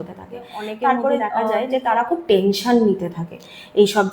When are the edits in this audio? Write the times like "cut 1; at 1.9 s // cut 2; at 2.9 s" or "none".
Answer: cut 1; at 1.4 s